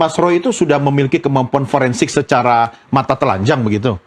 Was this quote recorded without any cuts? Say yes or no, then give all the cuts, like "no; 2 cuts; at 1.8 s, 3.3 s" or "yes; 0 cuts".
yes; 0 cuts